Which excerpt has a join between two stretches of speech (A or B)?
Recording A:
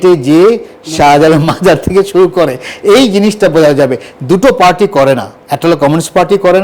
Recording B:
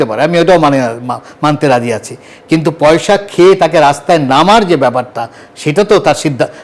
A